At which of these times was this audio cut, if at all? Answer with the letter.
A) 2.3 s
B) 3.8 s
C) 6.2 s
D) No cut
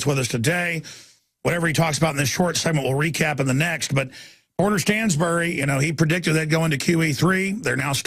D